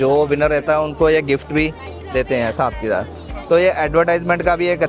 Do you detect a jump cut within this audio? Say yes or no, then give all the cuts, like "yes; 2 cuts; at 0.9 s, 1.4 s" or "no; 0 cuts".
no; 0 cuts